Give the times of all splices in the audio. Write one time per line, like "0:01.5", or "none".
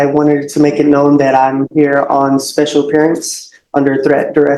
none